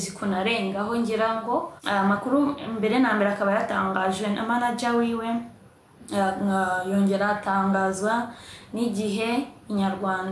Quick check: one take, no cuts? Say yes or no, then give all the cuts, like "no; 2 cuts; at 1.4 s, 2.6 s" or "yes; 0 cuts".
no; 1 cut; at 1.8 s